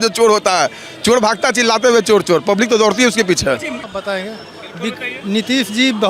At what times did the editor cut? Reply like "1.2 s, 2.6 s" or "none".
3.8 s